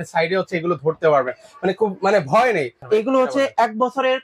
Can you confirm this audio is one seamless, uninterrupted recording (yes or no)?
no